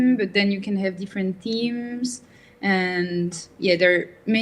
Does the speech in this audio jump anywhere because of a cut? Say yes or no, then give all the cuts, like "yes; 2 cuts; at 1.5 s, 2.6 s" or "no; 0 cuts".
no; 0 cuts